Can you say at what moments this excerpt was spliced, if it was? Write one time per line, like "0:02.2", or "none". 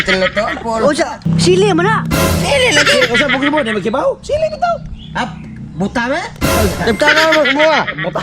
0:01.2